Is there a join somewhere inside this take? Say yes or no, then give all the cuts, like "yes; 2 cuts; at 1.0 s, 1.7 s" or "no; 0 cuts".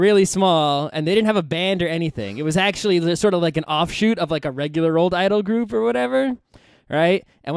no; 0 cuts